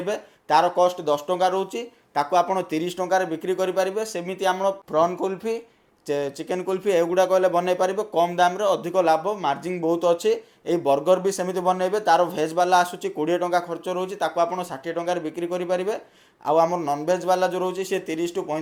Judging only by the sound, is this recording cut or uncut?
uncut